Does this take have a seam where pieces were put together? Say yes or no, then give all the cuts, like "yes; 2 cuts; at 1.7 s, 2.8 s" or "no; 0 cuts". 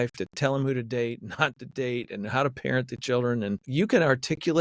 yes; 1 cut; at 3.7 s